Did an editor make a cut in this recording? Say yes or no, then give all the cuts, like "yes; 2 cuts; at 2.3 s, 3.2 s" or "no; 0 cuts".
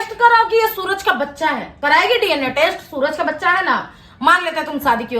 yes; 1 cut; at 1.7 s